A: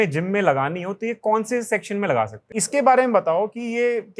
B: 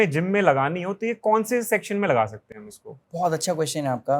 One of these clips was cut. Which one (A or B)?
A